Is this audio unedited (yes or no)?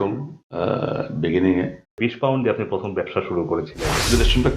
no